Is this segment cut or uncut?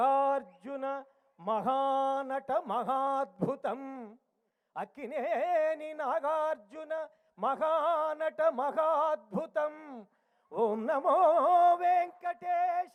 uncut